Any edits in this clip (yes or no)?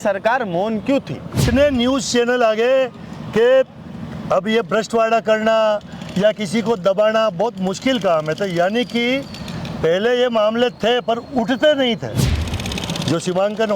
yes